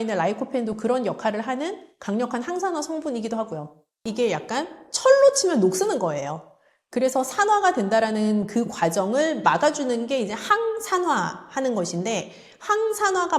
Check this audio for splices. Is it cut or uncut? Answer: cut